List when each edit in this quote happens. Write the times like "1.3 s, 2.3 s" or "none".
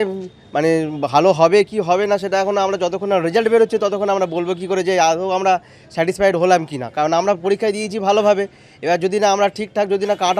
none